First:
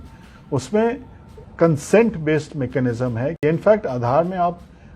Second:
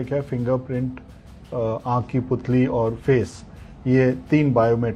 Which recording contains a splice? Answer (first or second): first